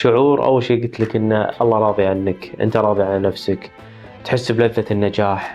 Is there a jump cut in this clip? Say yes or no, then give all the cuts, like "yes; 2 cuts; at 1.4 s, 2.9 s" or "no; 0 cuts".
no; 0 cuts